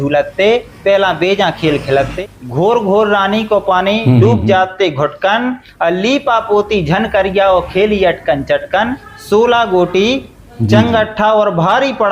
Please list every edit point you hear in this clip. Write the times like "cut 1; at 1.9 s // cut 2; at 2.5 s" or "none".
cut 1; at 2.1 s // cut 2; at 9.0 s